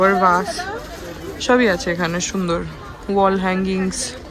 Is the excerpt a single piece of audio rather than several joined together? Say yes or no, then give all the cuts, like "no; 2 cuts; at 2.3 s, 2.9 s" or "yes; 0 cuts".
yes; 0 cuts